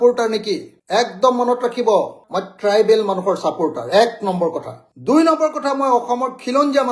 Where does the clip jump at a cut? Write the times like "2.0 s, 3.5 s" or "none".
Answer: none